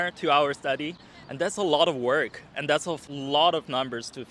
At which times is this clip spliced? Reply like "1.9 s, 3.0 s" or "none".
none